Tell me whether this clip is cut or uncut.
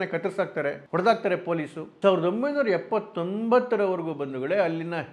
cut